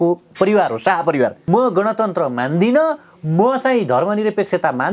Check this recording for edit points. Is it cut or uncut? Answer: cut